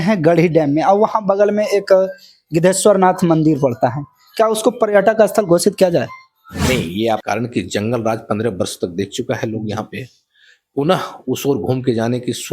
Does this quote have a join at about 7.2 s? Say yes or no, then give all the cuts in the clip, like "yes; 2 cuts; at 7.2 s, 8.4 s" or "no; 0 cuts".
yes; 1 cut; at 7.2 s